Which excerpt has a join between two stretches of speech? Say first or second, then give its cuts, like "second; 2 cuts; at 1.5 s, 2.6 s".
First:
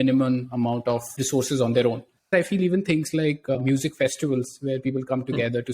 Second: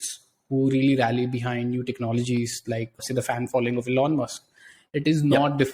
first; 1 cut; at 2.3 s